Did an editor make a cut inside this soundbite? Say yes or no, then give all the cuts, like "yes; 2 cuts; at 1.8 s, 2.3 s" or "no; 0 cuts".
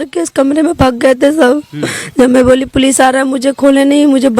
no; 0 cuts